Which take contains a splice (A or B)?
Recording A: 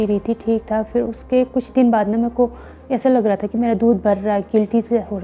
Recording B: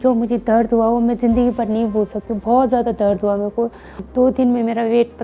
B